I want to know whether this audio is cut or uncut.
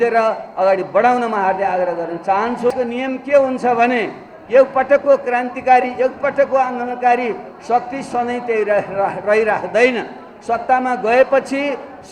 cut